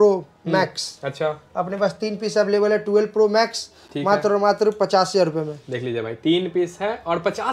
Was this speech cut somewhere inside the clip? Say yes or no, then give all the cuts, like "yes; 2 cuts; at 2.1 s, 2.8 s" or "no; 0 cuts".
no; 0 cuts